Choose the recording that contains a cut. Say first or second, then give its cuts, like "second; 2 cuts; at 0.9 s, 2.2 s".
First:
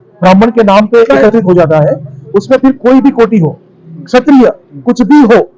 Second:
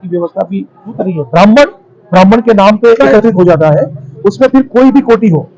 second; 1 cut; at 1.0 s